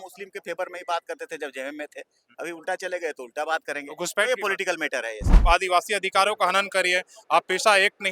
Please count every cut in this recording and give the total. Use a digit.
1